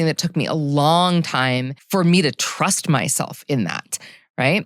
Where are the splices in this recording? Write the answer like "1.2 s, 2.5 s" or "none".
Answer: 1.7 s